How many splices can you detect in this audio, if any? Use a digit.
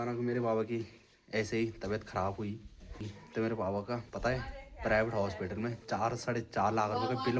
1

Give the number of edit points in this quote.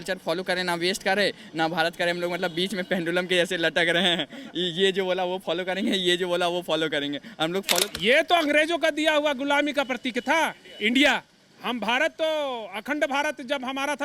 1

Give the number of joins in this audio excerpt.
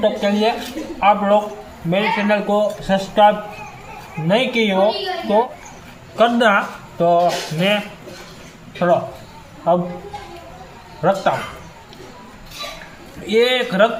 0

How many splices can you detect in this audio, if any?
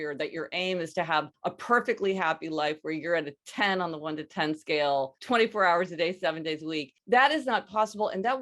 3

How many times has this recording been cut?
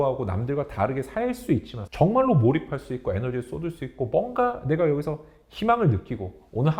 0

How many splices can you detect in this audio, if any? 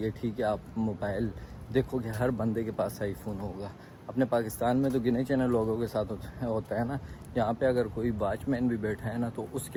0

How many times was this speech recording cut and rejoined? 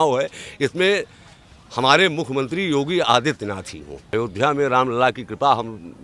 1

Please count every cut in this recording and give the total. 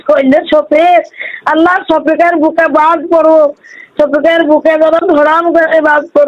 0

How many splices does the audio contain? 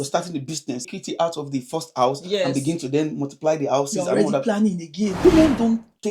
2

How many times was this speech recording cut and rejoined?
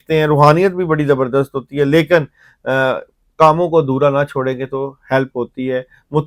0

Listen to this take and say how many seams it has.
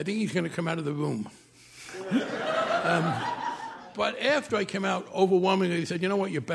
1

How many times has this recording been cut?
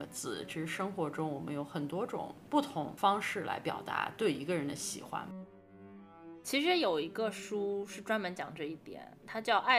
2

